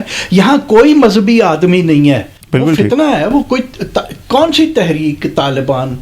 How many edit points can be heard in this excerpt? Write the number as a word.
one